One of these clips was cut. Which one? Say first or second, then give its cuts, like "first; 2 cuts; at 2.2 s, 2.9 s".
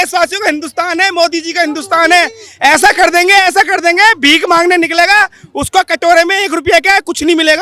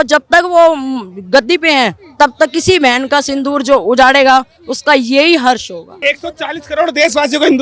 second; 1 cut; at 5.9 s